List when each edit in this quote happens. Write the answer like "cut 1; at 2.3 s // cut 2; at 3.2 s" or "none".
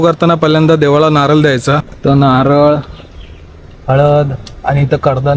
cut 1; at 1.9 s